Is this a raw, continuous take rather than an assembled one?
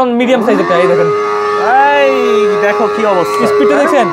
yes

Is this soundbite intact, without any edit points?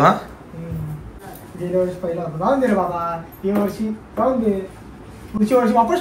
no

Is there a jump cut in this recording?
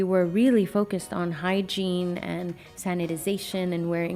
no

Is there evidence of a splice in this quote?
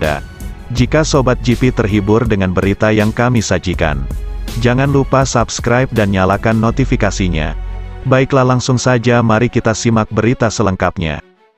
no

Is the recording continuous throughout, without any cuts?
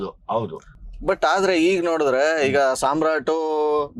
yes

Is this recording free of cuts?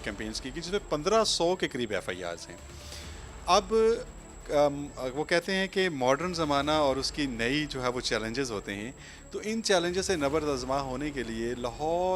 yes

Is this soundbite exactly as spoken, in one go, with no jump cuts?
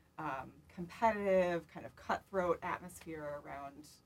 yes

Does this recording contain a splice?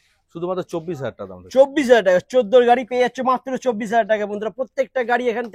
no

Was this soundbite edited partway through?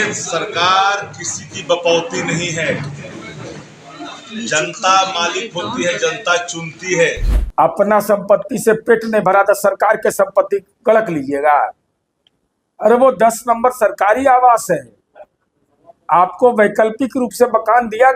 yes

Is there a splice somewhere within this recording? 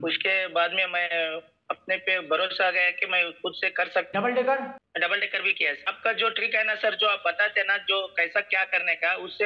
yes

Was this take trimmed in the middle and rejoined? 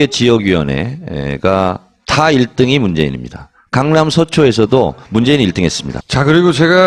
no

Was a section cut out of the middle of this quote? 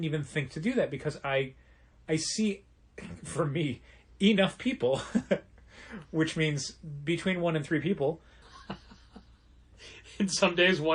no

